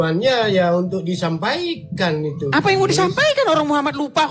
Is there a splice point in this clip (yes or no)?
no